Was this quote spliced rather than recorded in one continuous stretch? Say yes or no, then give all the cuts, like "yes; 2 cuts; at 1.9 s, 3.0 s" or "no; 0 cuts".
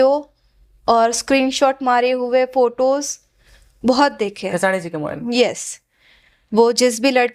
no; 0 cuts